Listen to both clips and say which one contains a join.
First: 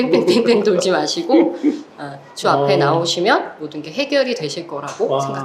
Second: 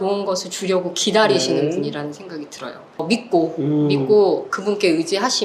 second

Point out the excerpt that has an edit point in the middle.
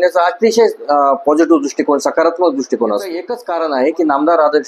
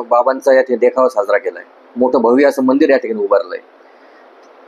first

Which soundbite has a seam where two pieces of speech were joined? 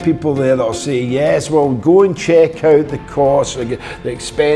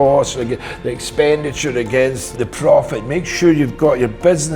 second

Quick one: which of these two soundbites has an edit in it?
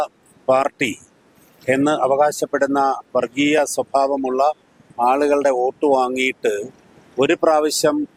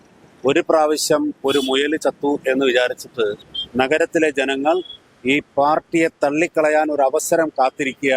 second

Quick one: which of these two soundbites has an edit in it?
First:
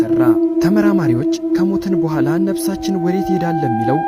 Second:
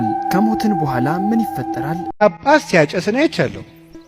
second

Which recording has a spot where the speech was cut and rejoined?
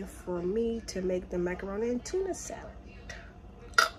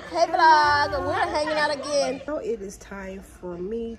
second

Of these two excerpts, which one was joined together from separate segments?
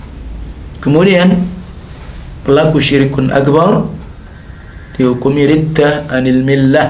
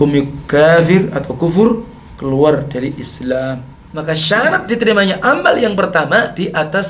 second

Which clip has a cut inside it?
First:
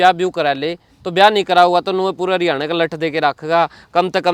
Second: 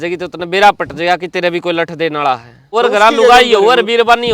second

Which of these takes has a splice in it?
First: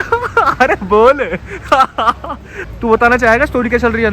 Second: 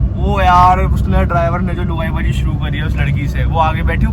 first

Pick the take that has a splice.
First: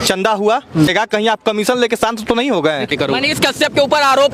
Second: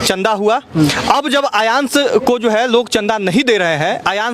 first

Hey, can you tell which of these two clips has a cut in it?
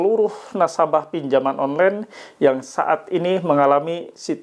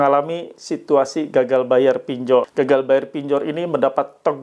second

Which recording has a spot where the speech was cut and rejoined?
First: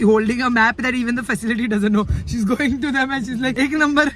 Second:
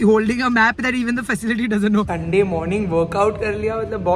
second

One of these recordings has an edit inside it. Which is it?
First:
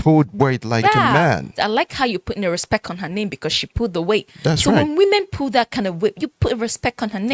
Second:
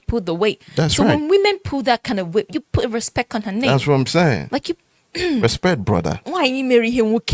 second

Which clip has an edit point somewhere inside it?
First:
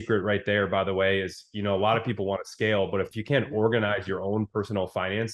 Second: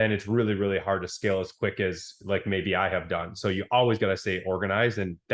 first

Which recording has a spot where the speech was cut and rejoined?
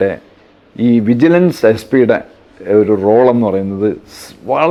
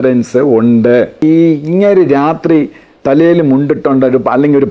second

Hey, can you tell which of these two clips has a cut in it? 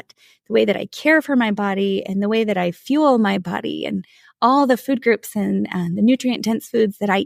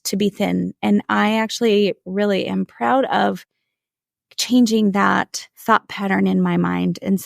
second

